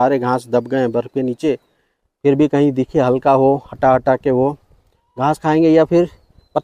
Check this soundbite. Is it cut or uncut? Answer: uncut